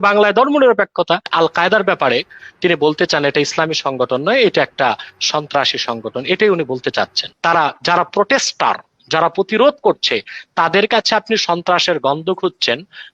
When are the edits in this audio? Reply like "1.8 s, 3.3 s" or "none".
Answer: 1.3 s, 7.2 s

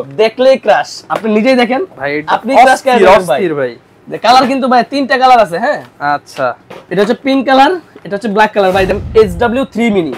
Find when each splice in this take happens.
8.9 s

